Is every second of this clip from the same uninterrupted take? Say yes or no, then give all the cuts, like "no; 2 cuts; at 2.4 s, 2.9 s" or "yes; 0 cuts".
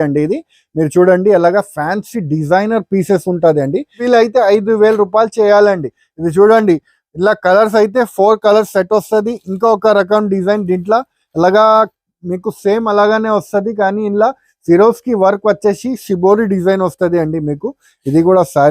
no; 1 cut; at 4.0 s